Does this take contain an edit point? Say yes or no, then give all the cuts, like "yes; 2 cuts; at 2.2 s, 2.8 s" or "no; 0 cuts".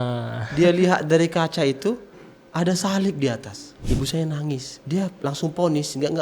yes; 2 cuts; at 3.8 s, 4.7 s